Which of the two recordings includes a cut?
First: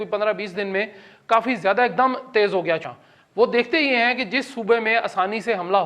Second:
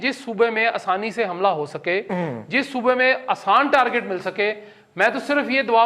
first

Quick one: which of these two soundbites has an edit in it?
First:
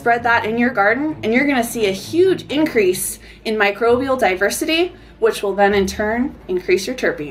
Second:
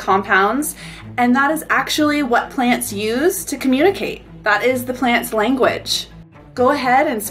second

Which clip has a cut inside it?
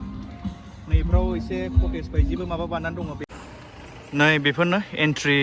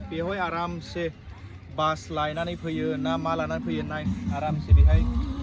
first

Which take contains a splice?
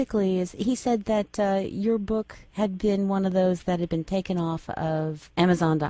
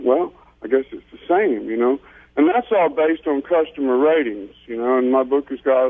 first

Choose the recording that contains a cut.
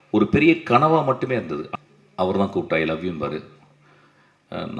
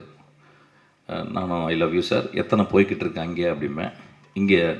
first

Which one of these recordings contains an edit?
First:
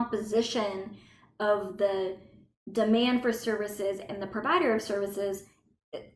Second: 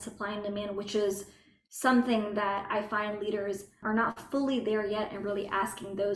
second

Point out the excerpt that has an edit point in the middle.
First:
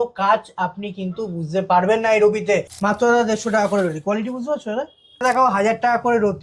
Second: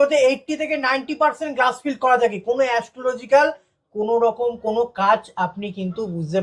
first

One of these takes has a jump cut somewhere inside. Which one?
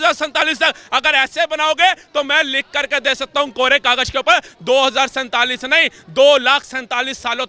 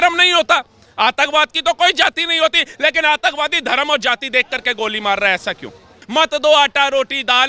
second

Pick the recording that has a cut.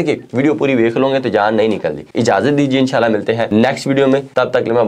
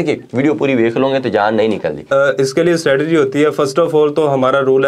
second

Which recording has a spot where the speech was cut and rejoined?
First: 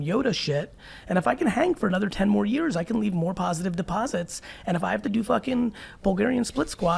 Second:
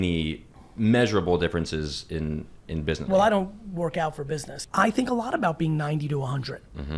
second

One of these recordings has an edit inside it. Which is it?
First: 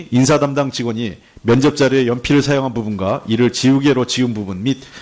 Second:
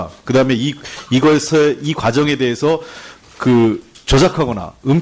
first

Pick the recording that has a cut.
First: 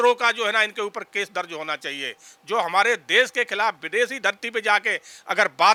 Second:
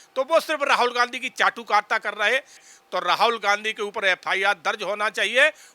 second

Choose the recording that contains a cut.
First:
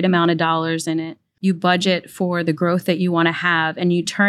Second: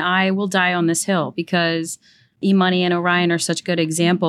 second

